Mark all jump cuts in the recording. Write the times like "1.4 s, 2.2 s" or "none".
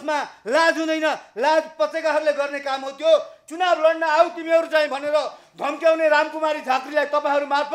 3.4 s